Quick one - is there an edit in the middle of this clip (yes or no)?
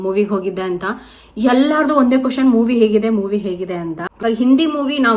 yes